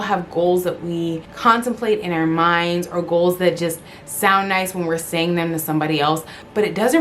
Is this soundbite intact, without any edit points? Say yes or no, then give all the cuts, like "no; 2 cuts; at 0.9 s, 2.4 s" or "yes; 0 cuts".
no; 1 cut; at 1.3 s